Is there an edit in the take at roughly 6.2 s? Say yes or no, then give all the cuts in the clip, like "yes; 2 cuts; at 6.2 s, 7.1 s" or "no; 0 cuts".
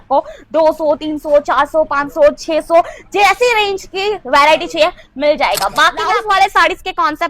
yes; 1 cut; at 6.2 s